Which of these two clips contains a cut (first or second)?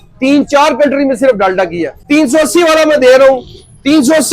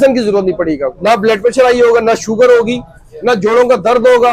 first